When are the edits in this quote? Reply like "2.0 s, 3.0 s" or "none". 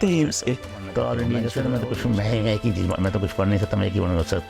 1.5 s